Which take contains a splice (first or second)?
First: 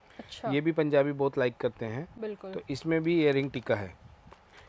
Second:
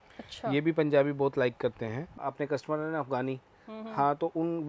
second